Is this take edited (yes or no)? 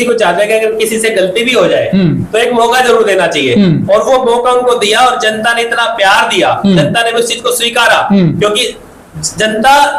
no